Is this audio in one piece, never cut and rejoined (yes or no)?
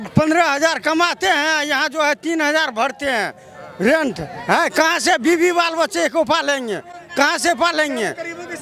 yes